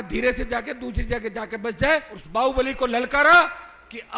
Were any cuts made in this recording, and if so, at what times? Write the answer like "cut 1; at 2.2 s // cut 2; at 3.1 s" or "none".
cut 1; at 2.2 s

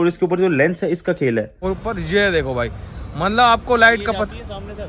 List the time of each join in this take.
cut 1; at 1.5 s

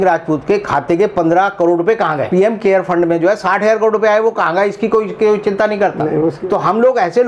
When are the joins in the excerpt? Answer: cut 1; at 2.3 s // cut 2; at 6.4 s

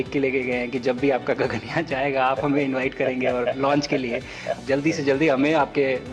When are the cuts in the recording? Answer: cut 1; at 4.6 s

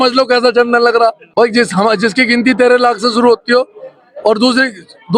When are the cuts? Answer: cut 1; at 1.2 s

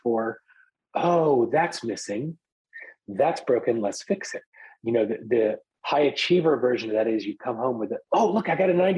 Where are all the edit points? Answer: cut 1; at 2.6 s

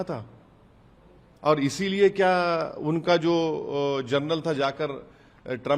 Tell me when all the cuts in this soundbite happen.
none

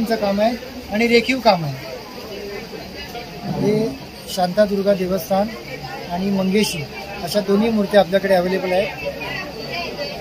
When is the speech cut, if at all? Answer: cut 1; at 3.1 s

